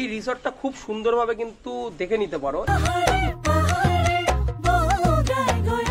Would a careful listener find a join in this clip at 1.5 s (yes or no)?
no